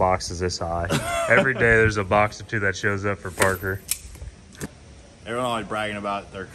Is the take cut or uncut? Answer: cut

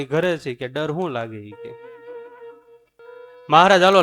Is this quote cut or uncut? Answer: cut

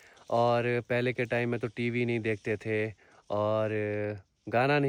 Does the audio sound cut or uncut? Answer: uncut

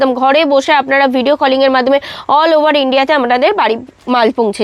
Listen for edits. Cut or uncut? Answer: uncut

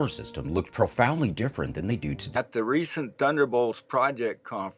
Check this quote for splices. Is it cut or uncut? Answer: uncut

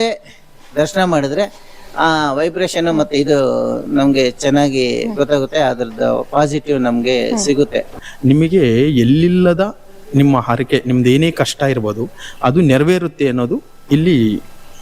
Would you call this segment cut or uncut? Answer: cut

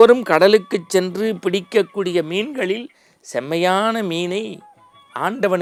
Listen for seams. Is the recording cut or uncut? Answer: uncut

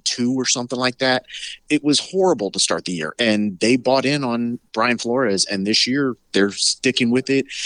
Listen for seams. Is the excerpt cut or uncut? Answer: cut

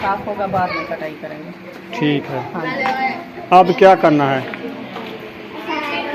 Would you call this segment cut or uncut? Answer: uncut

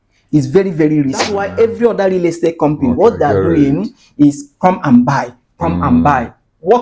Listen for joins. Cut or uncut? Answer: cut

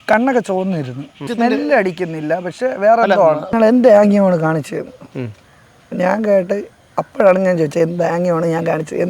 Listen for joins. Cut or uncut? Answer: cut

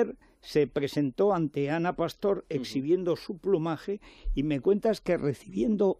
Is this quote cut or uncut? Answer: uncut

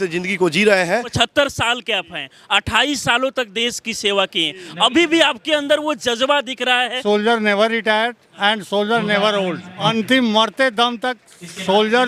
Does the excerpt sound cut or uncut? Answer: cut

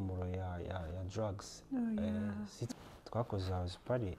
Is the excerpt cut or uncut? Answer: cut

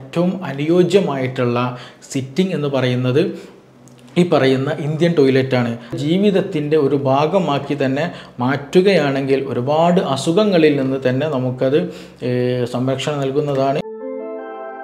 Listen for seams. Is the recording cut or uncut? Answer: cut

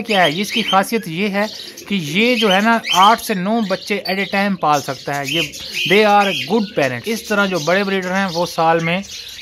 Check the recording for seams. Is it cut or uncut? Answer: cut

